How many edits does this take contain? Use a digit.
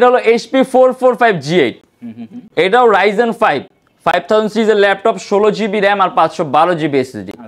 0